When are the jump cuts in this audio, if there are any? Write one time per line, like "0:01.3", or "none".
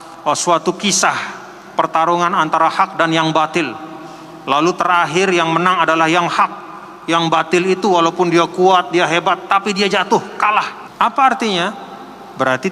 0:10.8